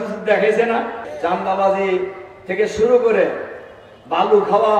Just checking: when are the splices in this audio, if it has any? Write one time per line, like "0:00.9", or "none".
0:01.0